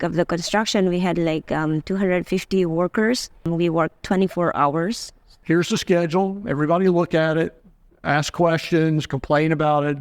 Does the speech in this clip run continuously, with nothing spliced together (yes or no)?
no